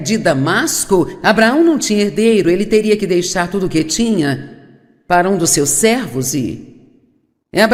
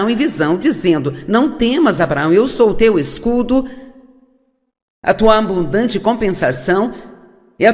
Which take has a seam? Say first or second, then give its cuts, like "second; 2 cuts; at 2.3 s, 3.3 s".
second; 1 cut; at 1.5 s